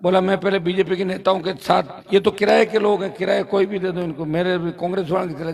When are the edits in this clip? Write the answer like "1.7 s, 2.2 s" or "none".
none